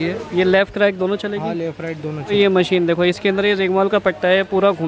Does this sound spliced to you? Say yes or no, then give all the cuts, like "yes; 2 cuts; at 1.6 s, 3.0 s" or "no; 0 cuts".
yes; 1 cut; at 2.3 s